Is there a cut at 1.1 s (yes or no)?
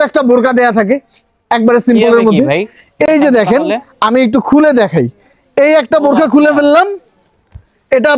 no